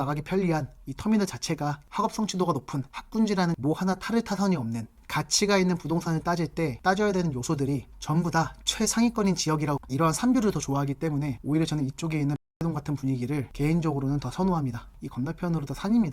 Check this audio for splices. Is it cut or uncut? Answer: cut